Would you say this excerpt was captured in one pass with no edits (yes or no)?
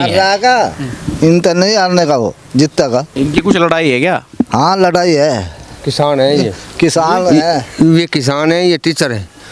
no